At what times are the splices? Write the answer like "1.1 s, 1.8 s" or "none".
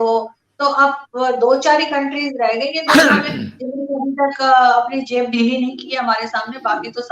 none

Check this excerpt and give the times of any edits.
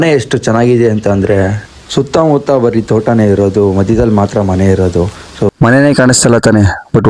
5.5 s

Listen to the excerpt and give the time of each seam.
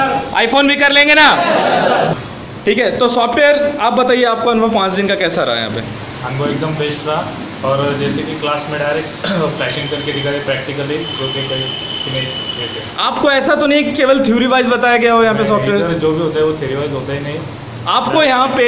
2.2 s

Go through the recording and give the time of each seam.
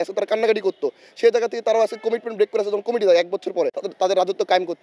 3.8 s

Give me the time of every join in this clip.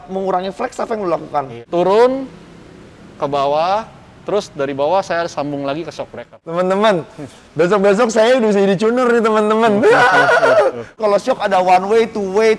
1.6 s, 6.3 s, 10.9 s

